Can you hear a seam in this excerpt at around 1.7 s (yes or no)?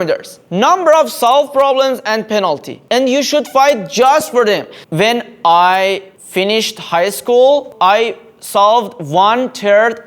no